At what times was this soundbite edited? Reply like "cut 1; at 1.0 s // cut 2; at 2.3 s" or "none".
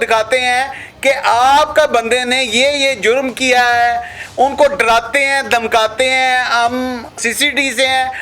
cut 1; at 4.2 s

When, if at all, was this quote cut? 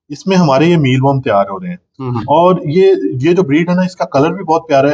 none

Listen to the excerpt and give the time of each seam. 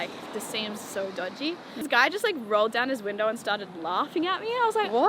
cut 1; at 1.8 s

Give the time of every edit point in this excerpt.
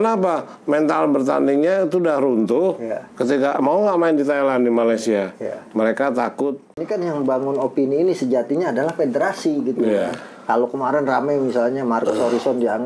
cut 1; at 6.8 s

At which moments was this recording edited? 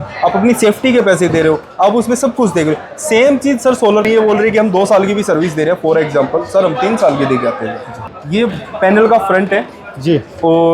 cut 1; at 4.0 s // cut 2; at 8.2 s

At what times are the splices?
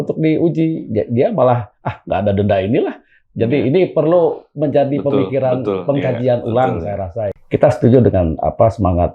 cut 1; at 7.4 s

